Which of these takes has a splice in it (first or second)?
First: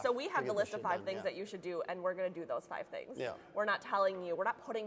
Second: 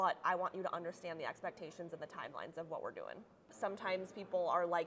second